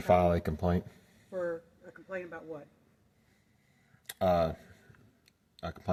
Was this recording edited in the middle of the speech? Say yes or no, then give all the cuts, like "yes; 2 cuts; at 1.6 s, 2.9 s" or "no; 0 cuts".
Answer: no; 0 cuts